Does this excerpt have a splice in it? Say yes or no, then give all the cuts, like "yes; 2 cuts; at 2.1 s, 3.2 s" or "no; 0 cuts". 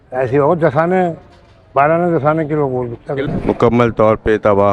yes; 1 cut; at 3.2 s